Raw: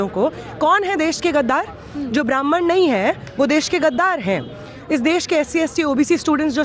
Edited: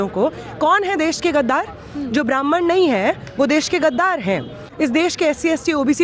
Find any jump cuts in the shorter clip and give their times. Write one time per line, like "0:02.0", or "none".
0:04.6